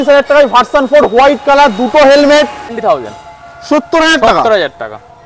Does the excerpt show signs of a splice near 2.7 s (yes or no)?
yes